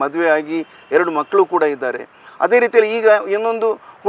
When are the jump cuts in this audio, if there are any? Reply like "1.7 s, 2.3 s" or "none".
none